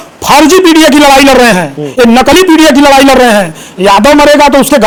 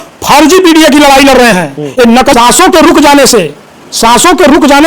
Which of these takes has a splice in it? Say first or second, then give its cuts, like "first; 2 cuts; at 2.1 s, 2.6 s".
second; 1 cut; at 2.3 s